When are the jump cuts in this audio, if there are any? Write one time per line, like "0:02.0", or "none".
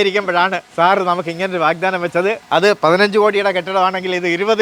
none